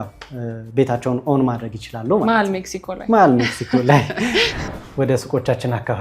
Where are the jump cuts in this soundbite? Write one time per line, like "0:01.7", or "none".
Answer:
0:04.7